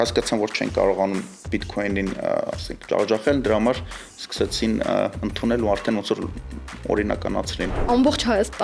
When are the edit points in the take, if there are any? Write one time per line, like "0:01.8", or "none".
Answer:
0:01.4
0:07.8